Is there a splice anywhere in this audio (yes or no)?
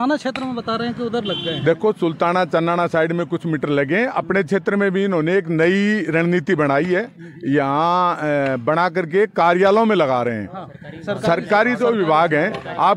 no